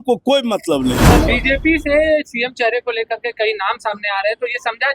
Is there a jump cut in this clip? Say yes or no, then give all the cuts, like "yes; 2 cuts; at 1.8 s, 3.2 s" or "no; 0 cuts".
yes; 1 cut; at 1.0 s